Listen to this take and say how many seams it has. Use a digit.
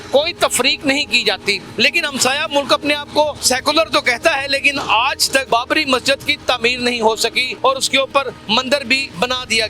5